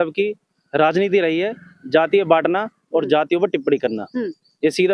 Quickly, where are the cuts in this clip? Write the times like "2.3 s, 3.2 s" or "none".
none